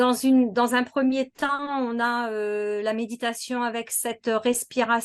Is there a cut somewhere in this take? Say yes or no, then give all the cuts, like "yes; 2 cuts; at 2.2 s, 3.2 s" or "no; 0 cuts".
no; 0 cuts